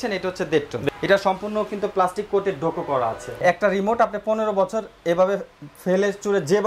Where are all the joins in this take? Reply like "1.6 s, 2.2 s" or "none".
0.8 s, 3.3 s